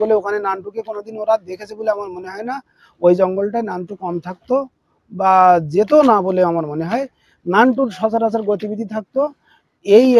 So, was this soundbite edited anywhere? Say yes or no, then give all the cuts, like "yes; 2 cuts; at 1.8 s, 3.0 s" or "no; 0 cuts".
no; 0 cuts